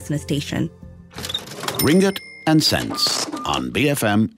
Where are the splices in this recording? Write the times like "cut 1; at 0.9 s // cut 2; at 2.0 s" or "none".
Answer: cut 1; at 1.0 s